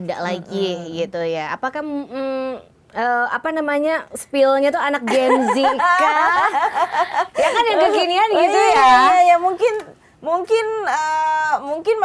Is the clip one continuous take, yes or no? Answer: yes